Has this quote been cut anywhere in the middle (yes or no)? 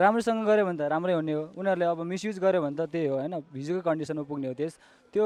no